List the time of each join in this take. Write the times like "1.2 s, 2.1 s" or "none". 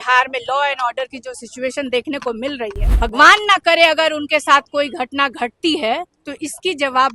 2.8 s